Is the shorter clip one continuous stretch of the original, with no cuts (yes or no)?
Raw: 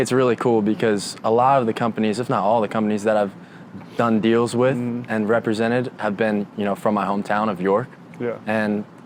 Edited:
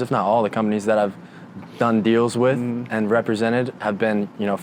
yes